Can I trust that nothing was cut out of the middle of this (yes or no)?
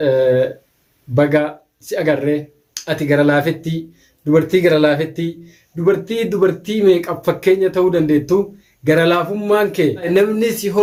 yes